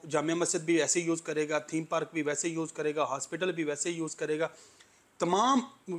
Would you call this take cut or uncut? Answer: uncut